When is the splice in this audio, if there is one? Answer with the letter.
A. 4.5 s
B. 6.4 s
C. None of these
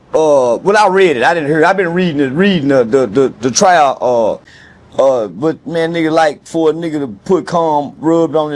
A